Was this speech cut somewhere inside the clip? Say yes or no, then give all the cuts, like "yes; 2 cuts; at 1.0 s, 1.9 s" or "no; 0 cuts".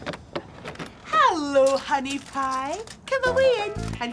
yes; 1 cut; at 1.0 s